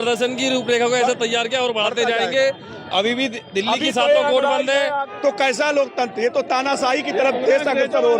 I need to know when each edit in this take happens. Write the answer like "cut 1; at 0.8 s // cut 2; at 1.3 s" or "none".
cut 1; at 5.1 s